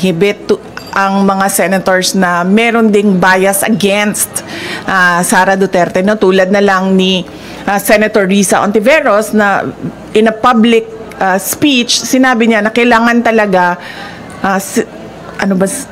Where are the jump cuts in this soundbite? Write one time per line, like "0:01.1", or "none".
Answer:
none